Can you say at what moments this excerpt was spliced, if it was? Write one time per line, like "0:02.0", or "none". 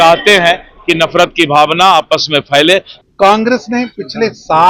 0:02.9